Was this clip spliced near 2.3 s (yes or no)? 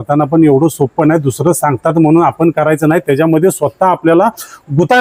no